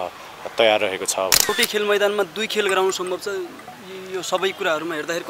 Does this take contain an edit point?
yes; 1 cut; at 1.5 s

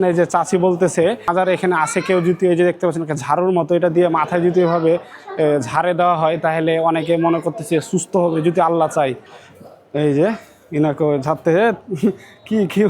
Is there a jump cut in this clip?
yes; 2 cuts; at 1.3 s, 9.5 s

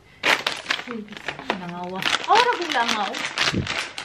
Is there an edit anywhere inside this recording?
no; 0 cuts

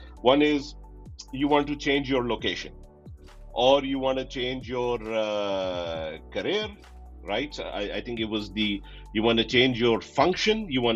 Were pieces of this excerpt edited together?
no; 0 cuts

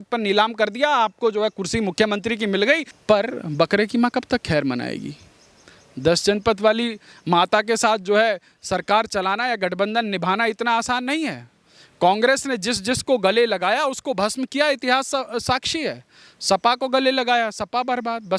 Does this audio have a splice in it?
yes; 1 cut; at 2.9 s

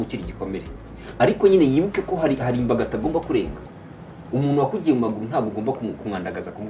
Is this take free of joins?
yes; 0 cuts

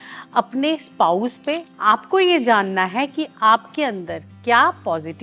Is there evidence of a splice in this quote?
yes; 1 cut; at 1.7 s

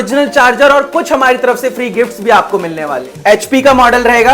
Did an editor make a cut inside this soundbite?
yes; 1 cut; at 3.1 s

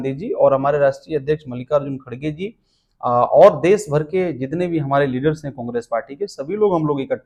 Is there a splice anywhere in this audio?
no; 0 cuts

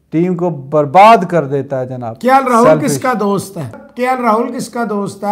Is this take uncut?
yes; 0 cuts

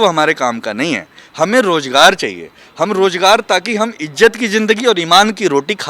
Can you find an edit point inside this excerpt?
no; 0 cuts

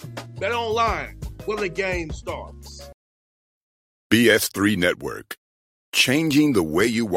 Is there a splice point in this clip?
yes; 1 cut; at 2.9 s

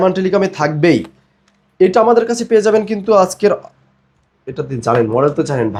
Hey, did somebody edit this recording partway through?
no; 0 cuts

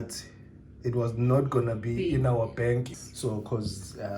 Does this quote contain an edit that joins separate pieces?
yes; 1 cut; at 2.9 s

